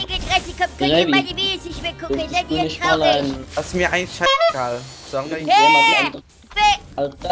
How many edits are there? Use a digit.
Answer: 0